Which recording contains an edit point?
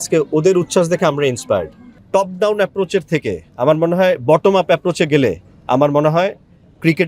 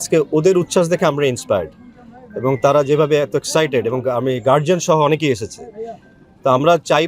first; 1 cut; at 2.0 s

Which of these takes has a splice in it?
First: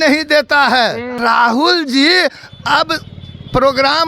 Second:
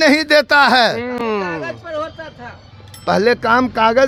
first; 1 cut; at 1.2 s

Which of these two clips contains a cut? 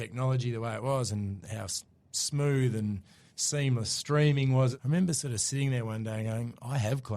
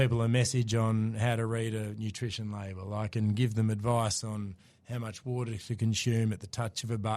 first; 1 cut; at 4.8 s

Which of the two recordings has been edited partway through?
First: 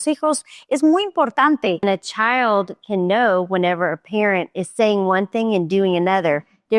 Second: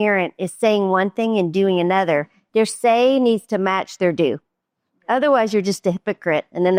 first; 1 cut; at 1.8 s

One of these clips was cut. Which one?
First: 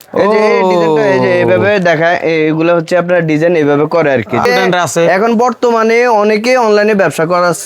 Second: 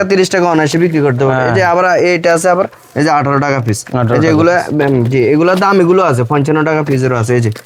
first; 1 cut; at 4.4 s

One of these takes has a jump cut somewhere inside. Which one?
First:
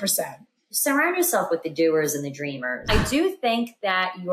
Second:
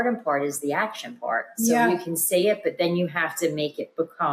first; 1 cut; at 2.9 s

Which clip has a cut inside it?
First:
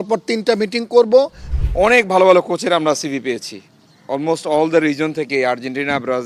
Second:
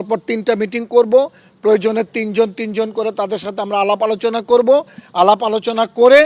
first; 1 cut; at 1.4 s

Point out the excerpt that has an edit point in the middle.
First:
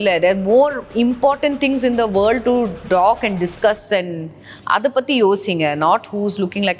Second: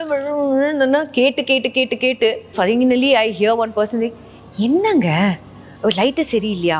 second; 1 cut; at 2.5 s

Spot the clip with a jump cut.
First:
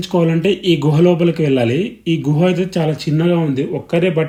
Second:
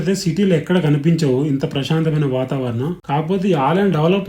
second; 1 cut; at 3.0 s

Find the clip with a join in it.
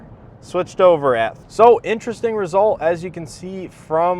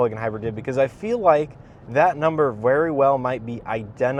first; 1 cut; at 1.4 s

